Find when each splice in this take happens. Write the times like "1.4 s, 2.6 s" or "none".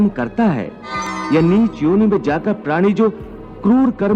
1.2 s